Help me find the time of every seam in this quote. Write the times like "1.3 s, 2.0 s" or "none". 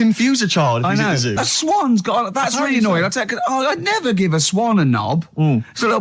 1.4 s